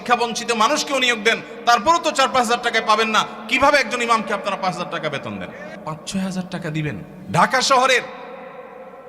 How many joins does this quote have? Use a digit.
2